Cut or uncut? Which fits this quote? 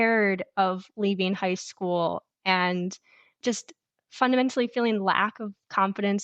cut